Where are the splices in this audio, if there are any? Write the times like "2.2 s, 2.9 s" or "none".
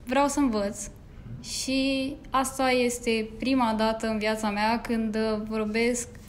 none